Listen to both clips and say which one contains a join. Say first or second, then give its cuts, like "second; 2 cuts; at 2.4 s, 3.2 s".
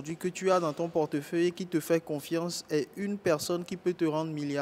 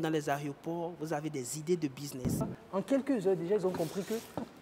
second; 1 cut; at 2.5 s